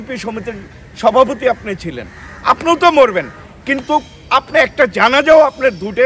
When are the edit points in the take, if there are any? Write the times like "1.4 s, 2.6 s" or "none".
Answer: none